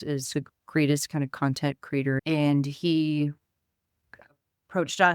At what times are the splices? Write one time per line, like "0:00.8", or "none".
0:02.2

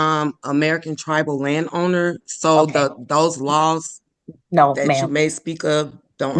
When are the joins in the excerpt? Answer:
none

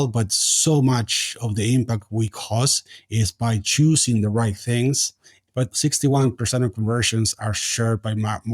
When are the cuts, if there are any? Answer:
0:05.6

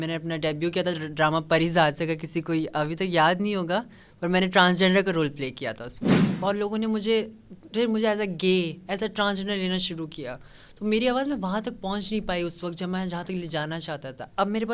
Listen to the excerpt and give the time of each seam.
0:06.1

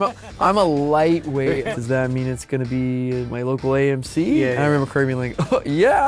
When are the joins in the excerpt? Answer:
0:01.7
0:03.3

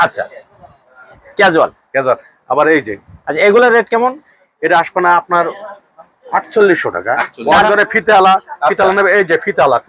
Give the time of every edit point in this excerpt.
0:07.5

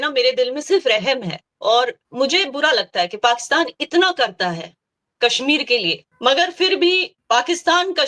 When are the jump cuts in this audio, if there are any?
0:02.0
0:06.1
0:07.1

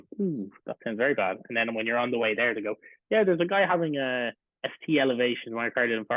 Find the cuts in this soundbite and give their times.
none

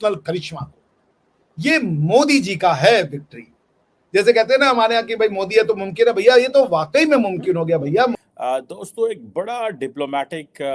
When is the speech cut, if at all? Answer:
0:08.1

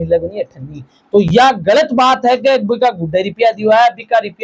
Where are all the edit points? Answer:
none

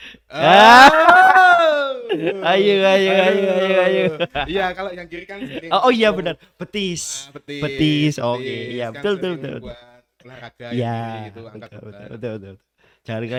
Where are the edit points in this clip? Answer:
none

